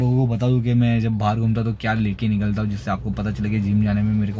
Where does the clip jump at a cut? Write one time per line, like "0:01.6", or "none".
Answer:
none